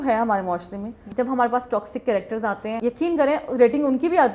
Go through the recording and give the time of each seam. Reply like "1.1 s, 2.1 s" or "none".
1.0 s, 2.8 s